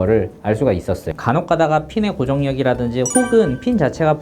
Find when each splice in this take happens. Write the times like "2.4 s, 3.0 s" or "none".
1.1 s